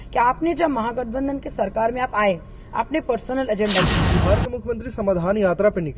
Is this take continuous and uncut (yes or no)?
no